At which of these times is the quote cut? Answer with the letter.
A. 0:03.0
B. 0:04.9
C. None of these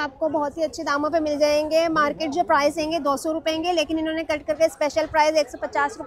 C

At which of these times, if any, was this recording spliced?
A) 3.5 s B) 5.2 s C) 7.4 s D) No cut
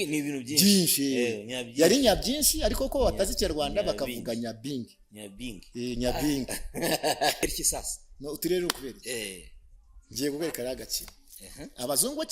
C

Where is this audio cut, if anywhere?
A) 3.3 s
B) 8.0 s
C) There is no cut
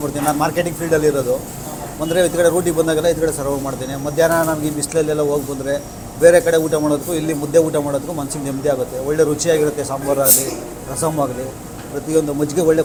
C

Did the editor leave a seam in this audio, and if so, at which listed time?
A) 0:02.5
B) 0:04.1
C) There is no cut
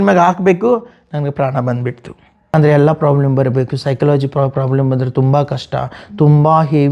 A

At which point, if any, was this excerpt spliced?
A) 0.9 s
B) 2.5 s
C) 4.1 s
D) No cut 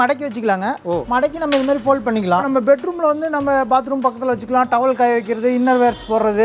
B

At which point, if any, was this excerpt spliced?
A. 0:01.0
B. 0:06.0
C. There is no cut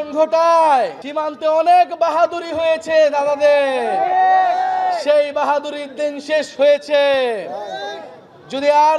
A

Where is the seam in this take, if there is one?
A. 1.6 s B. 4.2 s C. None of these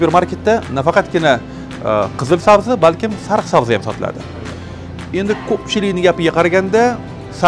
C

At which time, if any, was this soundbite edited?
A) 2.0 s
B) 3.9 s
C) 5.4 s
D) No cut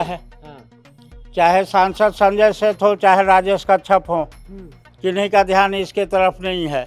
D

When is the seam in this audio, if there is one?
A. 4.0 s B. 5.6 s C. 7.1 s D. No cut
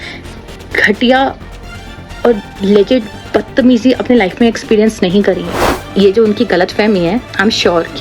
B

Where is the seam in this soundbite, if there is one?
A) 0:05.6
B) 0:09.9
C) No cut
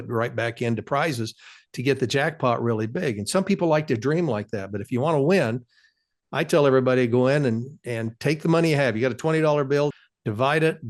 B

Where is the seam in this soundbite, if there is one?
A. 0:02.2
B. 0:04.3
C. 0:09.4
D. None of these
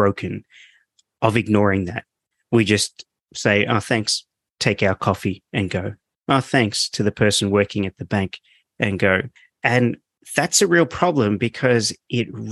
C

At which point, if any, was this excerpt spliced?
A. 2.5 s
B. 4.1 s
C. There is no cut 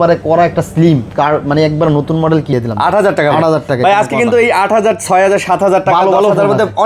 A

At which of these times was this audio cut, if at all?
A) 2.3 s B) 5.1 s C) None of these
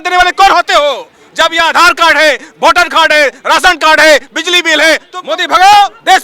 B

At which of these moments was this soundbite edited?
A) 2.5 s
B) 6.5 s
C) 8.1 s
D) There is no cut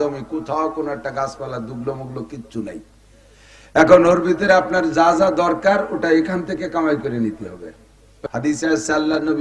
C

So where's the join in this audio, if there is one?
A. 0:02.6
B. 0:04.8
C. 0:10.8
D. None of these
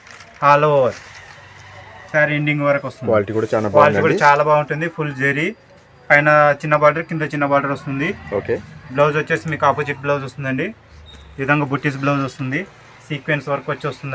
D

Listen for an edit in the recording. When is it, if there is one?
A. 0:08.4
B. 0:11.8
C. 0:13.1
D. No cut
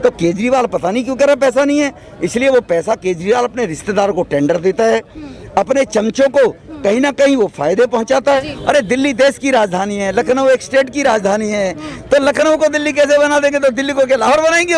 A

